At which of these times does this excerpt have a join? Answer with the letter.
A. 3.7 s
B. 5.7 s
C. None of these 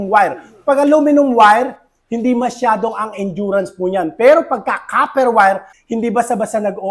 B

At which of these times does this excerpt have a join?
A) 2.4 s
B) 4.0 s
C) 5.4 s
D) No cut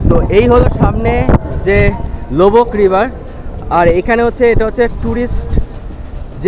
D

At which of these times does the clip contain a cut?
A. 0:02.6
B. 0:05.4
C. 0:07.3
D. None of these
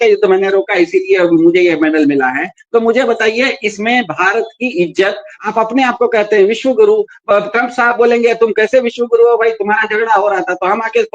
B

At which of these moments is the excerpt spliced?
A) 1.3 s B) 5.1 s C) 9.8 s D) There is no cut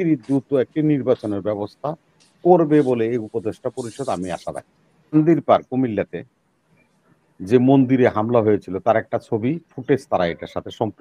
B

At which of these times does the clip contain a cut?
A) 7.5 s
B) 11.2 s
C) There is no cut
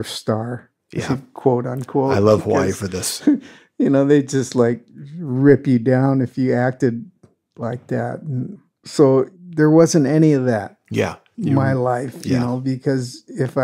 B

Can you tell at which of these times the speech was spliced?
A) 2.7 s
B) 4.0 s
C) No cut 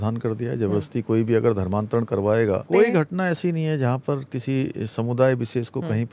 A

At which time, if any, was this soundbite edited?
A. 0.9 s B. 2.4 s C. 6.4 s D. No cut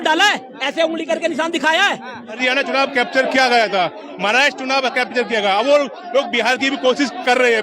B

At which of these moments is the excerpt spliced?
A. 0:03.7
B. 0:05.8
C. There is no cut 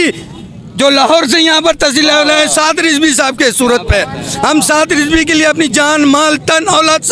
C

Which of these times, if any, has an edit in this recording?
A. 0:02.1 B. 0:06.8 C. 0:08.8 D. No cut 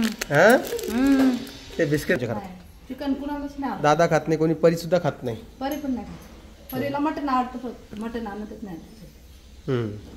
A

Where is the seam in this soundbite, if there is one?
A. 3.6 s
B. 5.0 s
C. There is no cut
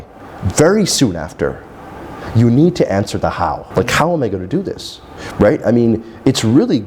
A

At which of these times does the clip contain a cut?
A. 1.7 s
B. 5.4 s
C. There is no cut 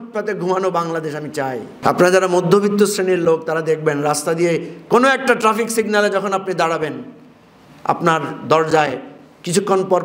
A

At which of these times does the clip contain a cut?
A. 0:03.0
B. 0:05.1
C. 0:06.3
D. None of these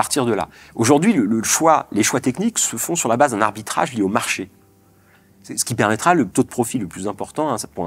C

